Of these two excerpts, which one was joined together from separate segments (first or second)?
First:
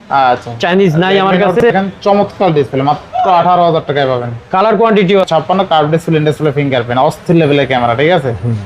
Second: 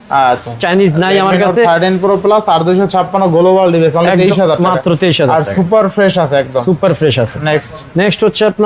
first